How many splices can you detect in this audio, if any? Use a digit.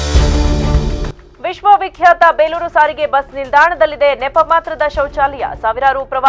1